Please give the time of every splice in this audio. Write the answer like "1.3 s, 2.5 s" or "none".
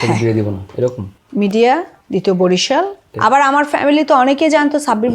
2.0 s, 3.0 s